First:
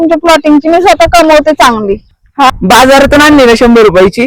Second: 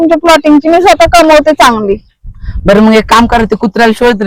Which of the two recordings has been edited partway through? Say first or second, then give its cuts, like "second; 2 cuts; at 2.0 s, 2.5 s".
first; 1 cut; at 2.5 s